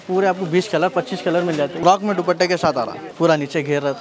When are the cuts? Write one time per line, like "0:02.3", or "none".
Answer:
0:01.7
0:03.0